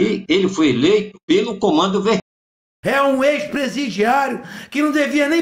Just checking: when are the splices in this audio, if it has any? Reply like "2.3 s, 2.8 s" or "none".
1.1 s, 2.2 s